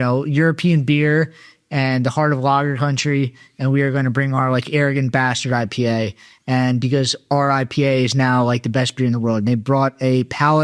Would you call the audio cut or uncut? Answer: uncut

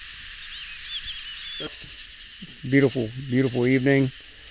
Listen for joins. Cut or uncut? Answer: cut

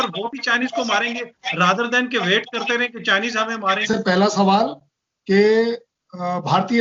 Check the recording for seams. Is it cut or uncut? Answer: uncut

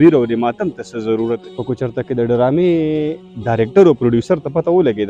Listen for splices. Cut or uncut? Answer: cut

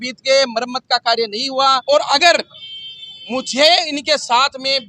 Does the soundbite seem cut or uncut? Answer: cut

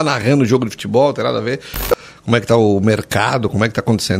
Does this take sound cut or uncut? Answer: cut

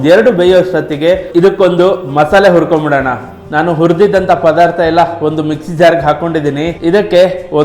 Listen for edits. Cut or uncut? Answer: cut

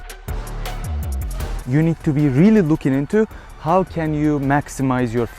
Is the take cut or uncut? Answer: cut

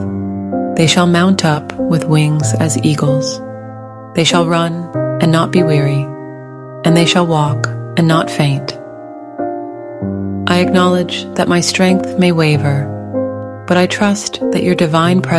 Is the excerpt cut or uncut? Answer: uncut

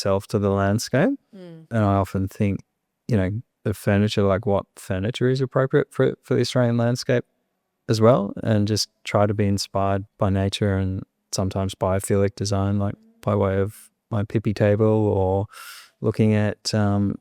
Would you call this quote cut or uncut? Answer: cut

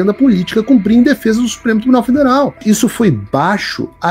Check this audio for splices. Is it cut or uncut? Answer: cut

